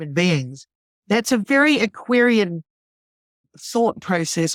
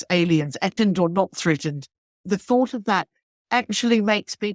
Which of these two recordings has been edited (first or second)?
second